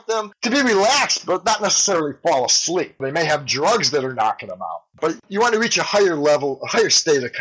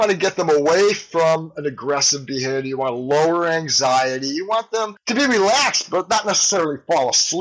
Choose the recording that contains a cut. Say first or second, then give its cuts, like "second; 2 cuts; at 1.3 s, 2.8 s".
first; 1 cut; at 5.2 s